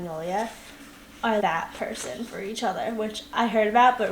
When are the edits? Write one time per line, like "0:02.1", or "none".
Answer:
0:01.4